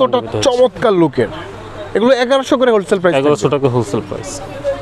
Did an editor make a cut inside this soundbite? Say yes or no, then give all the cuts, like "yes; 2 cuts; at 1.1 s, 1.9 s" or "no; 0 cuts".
no; 0 cuts